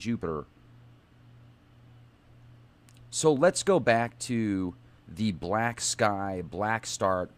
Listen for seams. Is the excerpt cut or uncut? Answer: cut